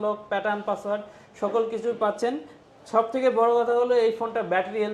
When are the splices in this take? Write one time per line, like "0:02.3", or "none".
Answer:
none